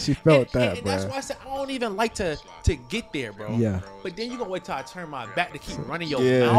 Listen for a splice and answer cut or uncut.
uncut